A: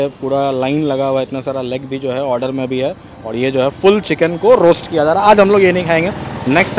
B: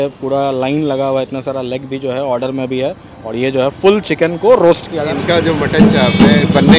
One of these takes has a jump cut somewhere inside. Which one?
B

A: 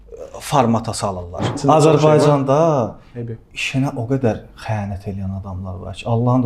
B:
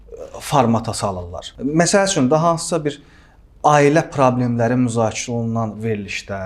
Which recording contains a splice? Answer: A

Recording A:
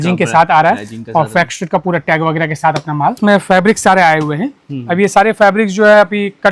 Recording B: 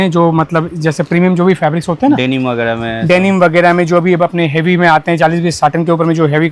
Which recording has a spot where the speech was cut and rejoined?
A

